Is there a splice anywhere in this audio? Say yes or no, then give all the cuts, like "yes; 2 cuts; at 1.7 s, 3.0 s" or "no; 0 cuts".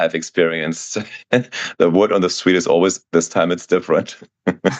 no; 0 cuts